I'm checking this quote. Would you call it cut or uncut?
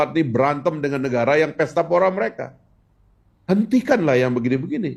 uncut